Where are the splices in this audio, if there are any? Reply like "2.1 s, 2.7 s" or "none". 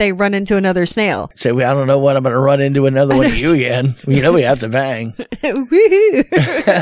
1.3 s